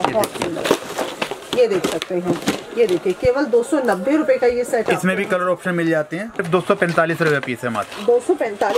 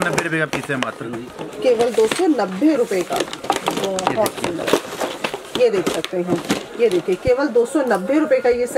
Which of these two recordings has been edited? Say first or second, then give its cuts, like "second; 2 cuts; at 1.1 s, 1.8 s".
first; 1 cut; at 6.4 s